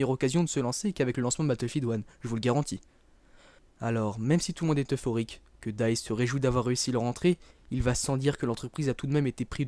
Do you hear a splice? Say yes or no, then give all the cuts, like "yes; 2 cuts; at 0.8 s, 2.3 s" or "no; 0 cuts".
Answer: no; 0 cuts